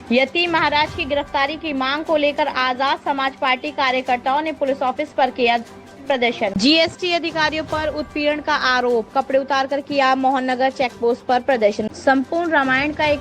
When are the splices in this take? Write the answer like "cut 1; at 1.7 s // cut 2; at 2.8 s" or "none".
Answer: cut 1; at 6.5 s // cut 2; at 11.8 s